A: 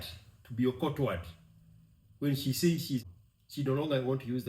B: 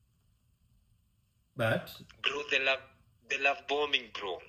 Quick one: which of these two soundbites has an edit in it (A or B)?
A